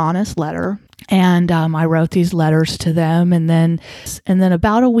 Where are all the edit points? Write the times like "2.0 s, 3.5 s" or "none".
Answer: 0.9 s, 4.1 s